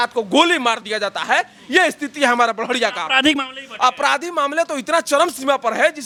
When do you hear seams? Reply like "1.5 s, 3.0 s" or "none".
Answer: none